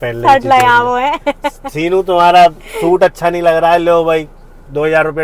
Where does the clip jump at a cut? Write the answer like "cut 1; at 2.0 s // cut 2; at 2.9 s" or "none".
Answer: none